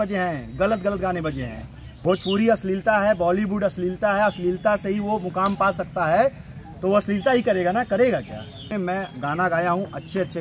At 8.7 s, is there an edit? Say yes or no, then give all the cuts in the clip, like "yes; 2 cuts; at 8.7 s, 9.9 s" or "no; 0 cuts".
yes; 2 cuts; at 1.9 s, 8.7 s